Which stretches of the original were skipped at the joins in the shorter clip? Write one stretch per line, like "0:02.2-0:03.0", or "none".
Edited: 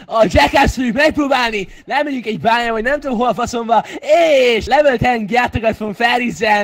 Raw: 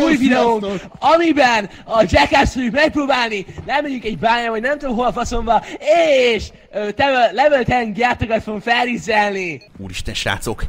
0:06.4-0:07.3